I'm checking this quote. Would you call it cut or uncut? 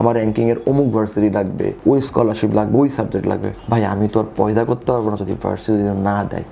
uncut